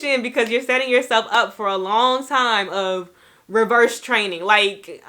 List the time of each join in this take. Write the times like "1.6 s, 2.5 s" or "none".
none